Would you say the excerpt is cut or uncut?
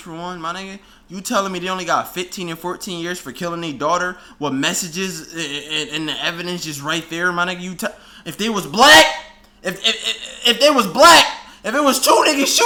uncut